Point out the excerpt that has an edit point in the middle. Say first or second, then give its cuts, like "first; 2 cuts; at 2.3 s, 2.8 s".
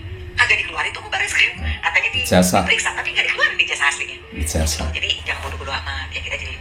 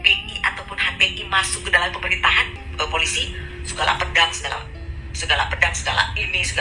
second; 1 cut; at 2.6 s